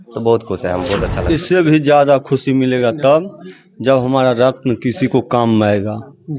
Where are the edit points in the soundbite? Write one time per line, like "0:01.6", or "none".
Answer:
0:01.1